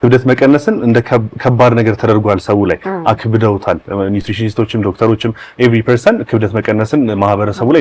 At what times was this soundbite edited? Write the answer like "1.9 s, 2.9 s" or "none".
none